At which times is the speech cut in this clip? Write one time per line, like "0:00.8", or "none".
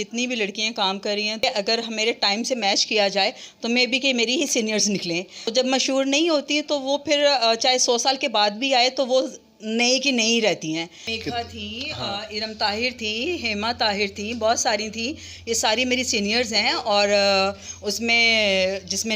0:01.4
0:05.5
0:11.1